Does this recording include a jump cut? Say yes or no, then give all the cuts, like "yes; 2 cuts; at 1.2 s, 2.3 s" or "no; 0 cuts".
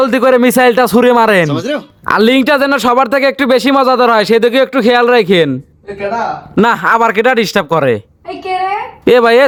no; 0 cuts